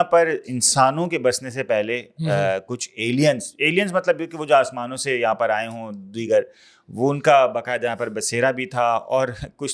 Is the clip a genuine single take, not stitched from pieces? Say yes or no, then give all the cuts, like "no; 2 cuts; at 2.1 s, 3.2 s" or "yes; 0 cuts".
yes; 0 cuts